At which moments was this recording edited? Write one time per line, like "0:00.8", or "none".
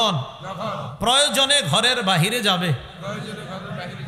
none